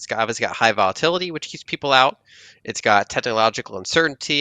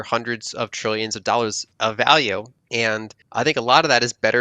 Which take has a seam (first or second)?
second